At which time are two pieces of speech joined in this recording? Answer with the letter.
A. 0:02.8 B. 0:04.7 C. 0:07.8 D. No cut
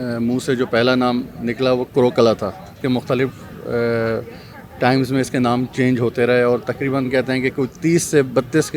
A